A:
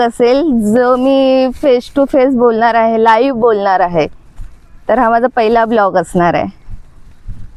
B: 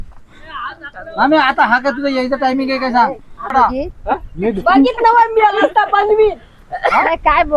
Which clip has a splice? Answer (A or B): B